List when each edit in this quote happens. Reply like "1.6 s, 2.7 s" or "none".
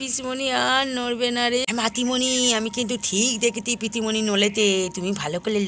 1.6 s